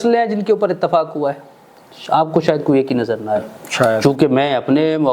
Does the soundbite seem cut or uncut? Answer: cut